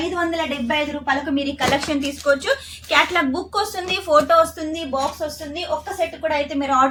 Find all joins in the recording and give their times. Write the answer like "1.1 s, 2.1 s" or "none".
none